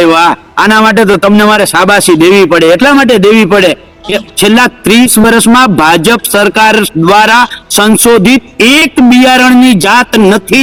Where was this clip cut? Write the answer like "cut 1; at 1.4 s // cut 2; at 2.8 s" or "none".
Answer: none